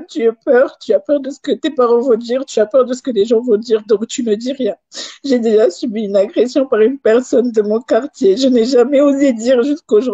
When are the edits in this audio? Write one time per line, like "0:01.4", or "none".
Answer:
0:01.9